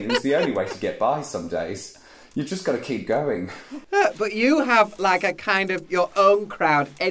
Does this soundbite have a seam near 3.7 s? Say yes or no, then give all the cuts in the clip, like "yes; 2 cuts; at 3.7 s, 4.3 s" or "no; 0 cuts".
yes; 1 cut; at 3.7 s